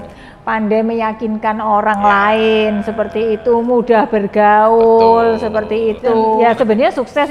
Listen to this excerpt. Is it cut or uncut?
cut